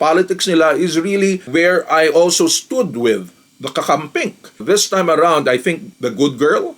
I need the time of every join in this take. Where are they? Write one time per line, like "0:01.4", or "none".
0:03.4
0:04.5